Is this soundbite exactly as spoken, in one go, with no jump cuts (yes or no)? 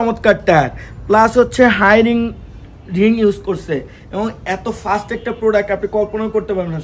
yes